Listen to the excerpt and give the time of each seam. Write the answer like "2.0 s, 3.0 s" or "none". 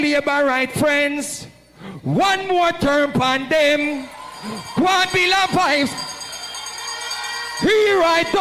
none